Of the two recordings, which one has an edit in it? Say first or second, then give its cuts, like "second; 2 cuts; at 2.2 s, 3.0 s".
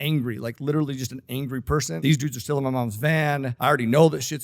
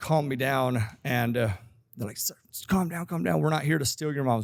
first; 2 cuts; at 1.9 s, 3.5 s